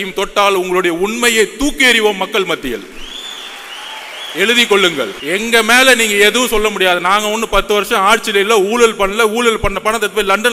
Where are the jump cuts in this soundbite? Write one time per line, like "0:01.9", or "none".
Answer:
0:05.2